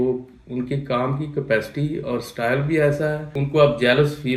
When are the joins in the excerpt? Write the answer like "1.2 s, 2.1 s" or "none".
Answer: 3.3 s

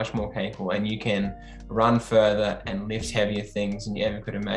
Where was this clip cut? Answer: none

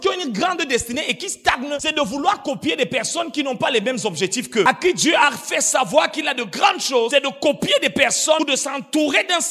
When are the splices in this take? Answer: 1.9 s, 4.7 s, 7.1 s, 8.4 s

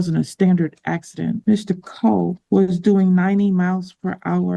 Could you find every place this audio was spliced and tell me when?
1.4 s, 2.4 s

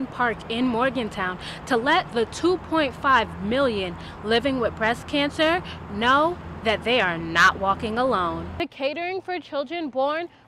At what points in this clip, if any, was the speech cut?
8.5 s

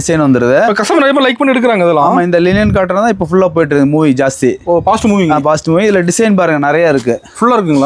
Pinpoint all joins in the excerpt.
none

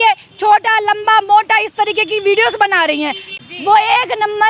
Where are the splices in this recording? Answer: 3.3 s

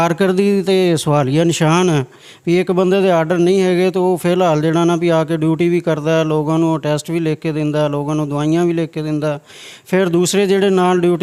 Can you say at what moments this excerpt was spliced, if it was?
none

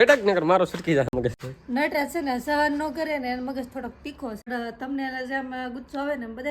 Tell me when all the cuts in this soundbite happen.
1.3 s, 4.5 s

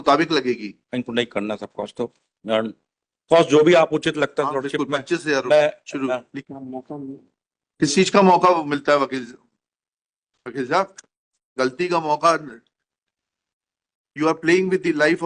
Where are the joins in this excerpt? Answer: 6.4 s

